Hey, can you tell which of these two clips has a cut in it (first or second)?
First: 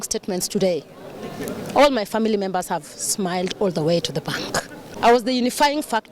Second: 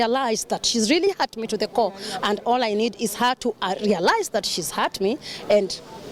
first